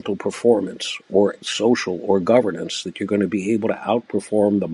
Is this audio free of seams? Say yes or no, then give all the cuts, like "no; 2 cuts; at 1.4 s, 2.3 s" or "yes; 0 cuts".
yes; 0 cuts